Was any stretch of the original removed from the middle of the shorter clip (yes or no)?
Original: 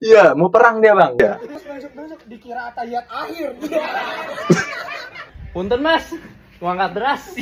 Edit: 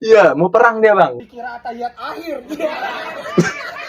yes